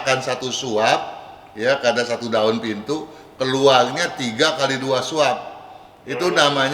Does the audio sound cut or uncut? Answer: uncut